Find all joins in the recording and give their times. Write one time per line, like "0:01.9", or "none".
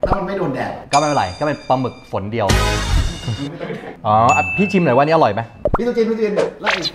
0:03.8